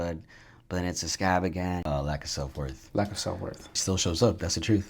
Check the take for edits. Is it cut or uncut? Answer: cut